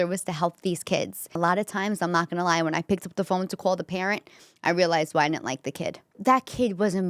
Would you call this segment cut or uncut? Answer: cut